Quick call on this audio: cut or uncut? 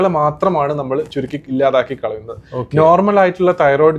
cut